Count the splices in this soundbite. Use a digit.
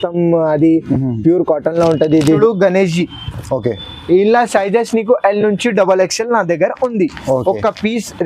1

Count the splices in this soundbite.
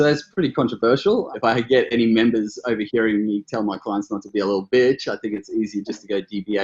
1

